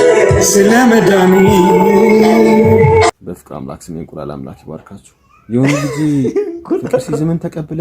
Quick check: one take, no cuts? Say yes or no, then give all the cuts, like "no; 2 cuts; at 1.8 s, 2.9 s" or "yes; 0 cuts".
no; 1 cut; at 3.2 s